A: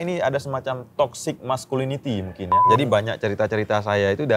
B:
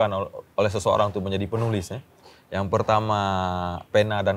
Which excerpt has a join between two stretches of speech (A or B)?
A